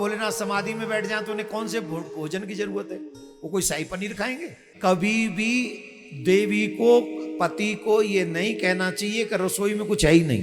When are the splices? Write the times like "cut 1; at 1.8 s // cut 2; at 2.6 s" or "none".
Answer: cut 1; at 4.6 s